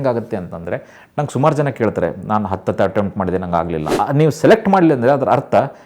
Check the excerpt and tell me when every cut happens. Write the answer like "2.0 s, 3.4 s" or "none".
3.9 s